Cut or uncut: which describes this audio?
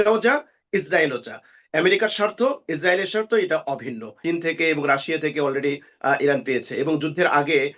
cut